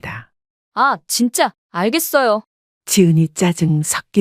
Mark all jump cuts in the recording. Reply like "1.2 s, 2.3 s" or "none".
1.6 s